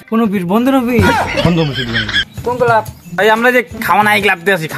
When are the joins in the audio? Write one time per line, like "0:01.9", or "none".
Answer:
0:02.3